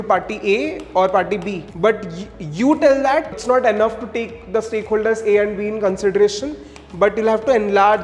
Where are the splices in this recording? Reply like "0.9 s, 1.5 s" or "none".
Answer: 1.6 s, 3.4 s